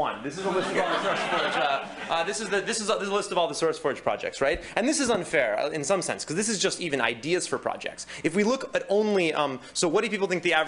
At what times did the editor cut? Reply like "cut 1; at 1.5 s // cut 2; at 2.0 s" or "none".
none